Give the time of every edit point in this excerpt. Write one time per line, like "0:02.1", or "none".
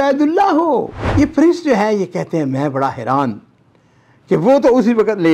0:01.0